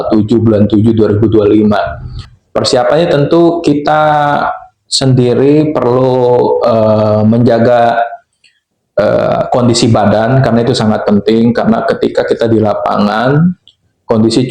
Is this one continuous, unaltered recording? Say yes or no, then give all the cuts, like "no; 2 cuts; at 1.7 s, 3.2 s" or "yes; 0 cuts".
no; 1 cut; at 2.3 s